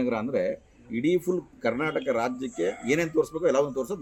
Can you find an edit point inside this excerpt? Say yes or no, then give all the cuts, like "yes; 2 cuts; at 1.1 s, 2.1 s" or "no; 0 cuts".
no; 0 cuts